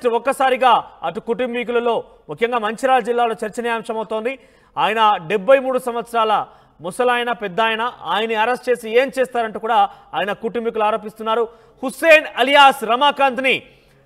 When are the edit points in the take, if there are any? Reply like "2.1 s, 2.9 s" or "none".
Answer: none